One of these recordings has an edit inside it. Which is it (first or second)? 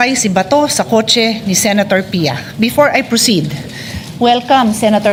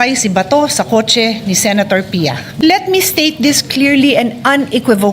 second